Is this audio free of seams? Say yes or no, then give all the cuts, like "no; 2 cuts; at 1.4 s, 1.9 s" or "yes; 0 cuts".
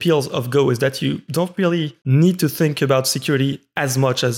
no; 1 cut; at 2.0 s